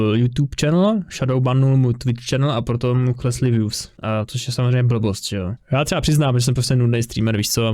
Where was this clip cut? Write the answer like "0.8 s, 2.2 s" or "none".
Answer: 5.6 s